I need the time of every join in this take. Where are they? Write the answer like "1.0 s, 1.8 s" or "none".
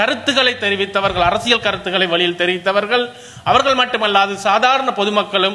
none